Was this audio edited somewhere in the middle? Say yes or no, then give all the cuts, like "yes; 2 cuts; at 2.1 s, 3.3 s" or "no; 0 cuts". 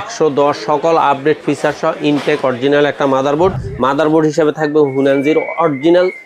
yes; 1 cut; at 3.7 s